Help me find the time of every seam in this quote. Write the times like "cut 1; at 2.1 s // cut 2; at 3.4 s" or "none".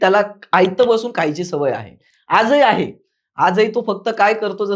none